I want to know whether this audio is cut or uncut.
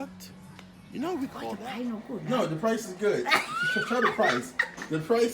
cut